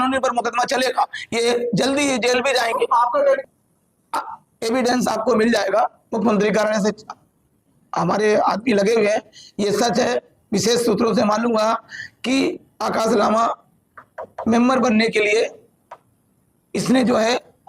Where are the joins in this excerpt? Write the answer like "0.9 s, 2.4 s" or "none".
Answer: 3.4 s